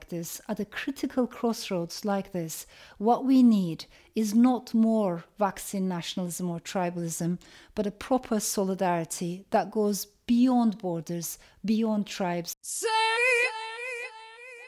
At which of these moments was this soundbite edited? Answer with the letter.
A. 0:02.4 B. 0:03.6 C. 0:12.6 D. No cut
C